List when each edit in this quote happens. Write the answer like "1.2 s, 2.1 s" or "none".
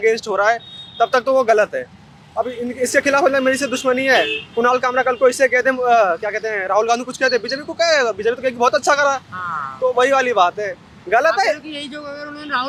none

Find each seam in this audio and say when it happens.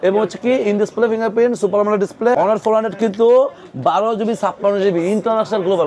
2.4 s

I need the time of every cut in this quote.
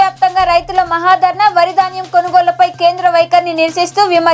none

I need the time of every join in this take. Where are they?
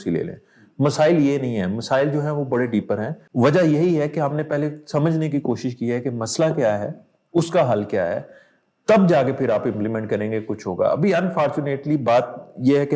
3.2 s

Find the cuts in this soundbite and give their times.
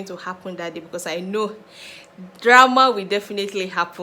none

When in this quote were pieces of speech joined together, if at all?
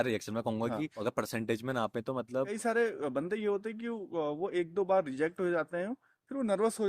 1.0 s, 2.5 s

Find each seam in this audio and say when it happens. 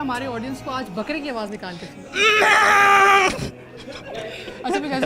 none

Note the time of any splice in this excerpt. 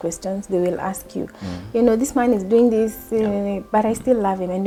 none

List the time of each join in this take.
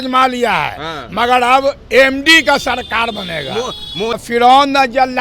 4.1 s

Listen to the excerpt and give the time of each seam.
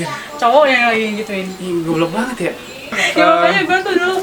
3.0 s

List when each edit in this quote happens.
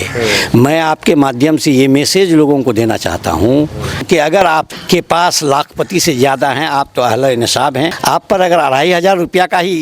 4.4 s, 8.0 s

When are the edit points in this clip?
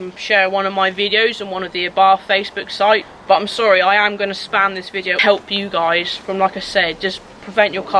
3.1 s, 5.1 s

